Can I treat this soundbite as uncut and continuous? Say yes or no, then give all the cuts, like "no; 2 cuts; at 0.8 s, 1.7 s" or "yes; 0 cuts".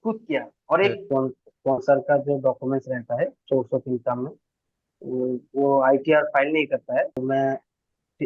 no; 2 cuts; at 1.0 s, 7.2 s